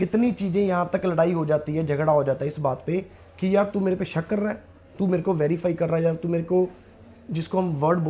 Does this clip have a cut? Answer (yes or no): no